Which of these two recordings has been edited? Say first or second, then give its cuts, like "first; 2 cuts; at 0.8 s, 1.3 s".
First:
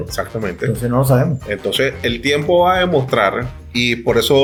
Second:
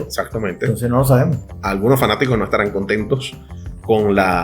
second; 1 cut; at 1.4 s